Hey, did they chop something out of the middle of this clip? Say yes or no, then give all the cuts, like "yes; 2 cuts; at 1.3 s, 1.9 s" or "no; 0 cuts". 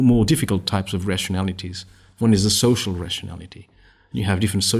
no; 0 cuts